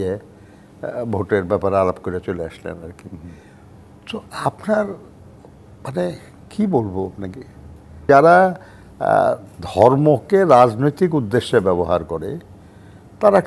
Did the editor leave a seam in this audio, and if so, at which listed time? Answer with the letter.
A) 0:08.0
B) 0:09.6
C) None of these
A